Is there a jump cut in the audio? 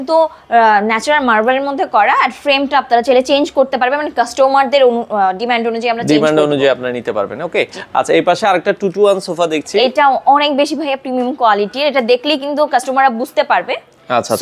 no; 0 cuts

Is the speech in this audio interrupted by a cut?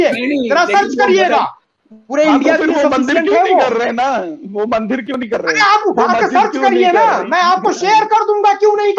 yes; 1 cut; at 1.6 s

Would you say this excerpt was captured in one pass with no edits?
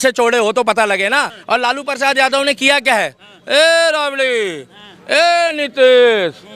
no; 1 cut; at 1.3 s

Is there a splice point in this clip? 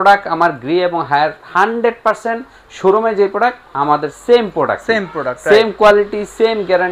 no; 0 cuts

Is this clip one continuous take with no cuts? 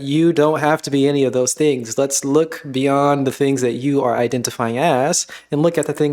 yes; 0 cuts

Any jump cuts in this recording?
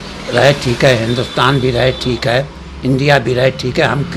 no; 0 cuts

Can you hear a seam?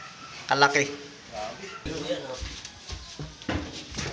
yes; 1 cut; at 1.9 s

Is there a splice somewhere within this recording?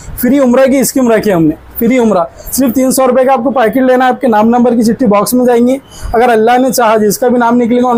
no; 0 cuts

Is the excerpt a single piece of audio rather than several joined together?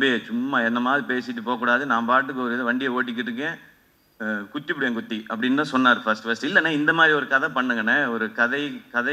yes; 0 cuts

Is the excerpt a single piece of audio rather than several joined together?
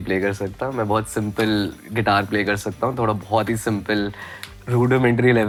yes; 0 cuts

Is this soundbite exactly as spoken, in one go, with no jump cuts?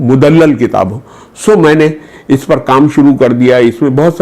yes; 0 cuts

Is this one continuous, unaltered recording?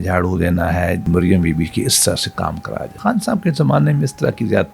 no; 2 cuts; at 1.0 s, 2.9 s

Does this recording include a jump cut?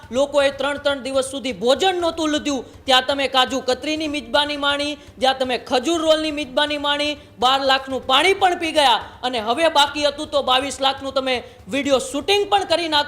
no; 0 cuts

